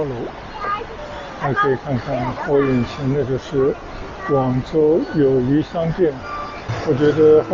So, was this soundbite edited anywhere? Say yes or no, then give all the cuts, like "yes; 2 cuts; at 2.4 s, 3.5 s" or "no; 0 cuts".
yes; 2 cuts; at 1.0 s, 6.7 s